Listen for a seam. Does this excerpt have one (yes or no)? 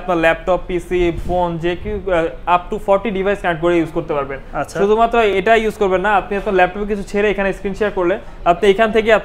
no